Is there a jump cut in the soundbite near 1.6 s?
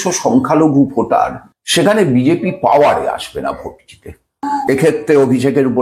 no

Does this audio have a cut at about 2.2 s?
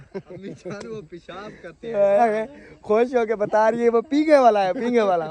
yes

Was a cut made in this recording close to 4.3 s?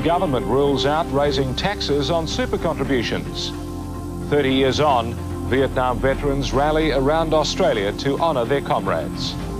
yes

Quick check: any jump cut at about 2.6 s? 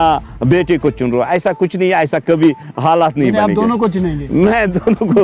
no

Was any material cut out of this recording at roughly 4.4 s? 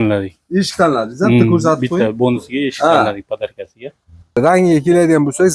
yes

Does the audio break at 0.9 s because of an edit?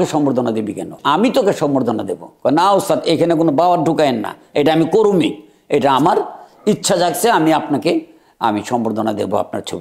yes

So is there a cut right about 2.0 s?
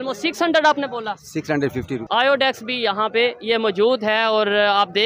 yes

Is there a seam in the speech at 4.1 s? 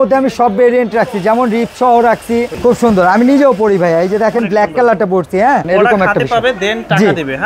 no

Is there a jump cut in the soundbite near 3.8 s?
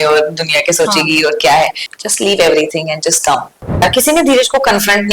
yes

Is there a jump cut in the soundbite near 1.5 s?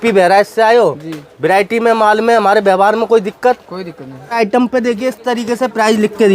no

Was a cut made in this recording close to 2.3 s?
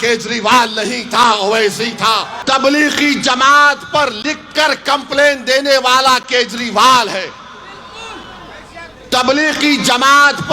yes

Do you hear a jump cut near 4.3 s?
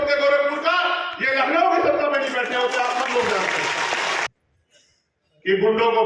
yes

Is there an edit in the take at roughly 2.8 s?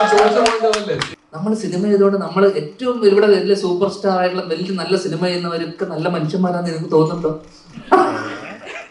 no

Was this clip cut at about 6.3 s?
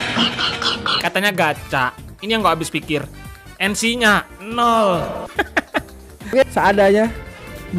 yes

